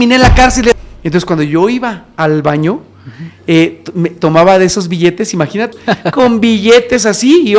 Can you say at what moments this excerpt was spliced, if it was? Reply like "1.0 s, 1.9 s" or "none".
0.8 s, 5.7 s

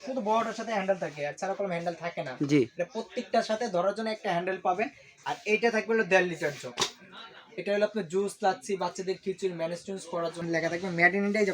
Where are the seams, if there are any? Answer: 5.1 s, 10.4 s

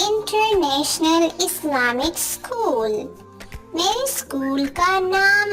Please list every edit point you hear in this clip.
none

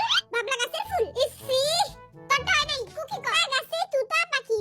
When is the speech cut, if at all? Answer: 3.4 s

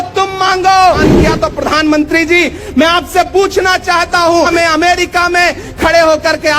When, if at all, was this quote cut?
1.0 s, 4.5 s

